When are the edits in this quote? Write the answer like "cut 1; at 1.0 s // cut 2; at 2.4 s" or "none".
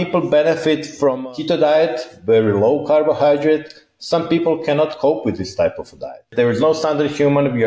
cut 1; at 0.9 s // cut 2; at 6.3 s